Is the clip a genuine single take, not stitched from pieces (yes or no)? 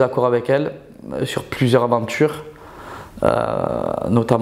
yes